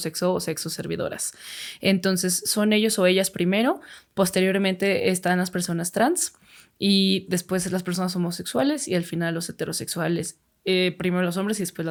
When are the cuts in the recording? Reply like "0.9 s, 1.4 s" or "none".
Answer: none